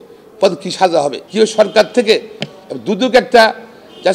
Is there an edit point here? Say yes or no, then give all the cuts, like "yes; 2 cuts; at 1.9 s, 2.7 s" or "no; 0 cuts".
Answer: yes; 1 cut; at 1.2 s